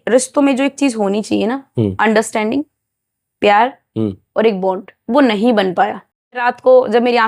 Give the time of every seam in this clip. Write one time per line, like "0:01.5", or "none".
0:06.3